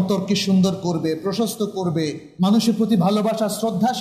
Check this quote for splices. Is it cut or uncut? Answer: cut